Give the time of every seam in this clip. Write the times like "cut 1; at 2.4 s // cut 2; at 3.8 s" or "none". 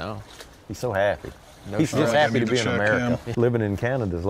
cut 1; at 3.3 s